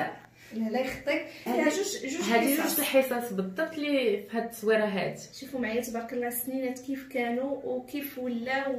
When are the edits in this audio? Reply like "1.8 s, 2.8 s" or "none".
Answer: 1.5 s

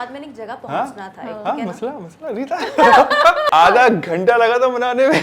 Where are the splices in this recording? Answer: 3.5 s

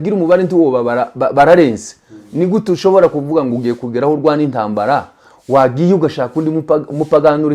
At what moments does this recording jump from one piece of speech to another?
none

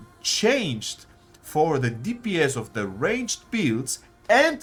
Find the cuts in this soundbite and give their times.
none

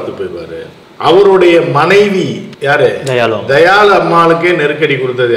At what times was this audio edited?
2.5 s

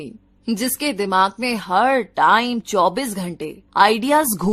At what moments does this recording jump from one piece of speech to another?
none

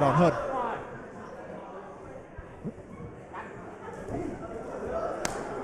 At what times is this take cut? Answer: none

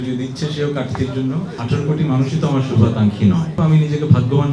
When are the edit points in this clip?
1.6 s, 3.5 s

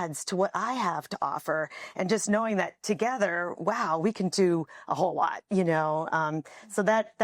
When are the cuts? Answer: none

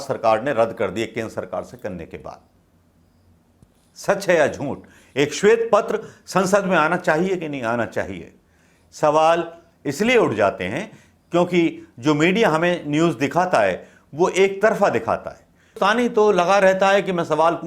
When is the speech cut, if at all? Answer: 15.8 s

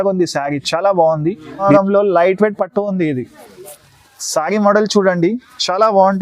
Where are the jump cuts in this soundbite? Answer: 1.6 s

